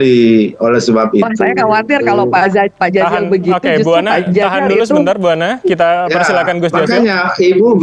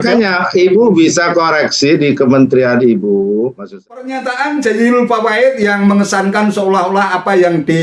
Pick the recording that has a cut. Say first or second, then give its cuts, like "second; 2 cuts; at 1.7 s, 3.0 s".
second; 1 cut; at 3.6 s